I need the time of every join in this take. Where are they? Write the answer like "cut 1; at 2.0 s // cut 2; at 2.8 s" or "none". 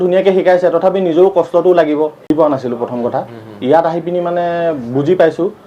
cut 1; at 2.3 s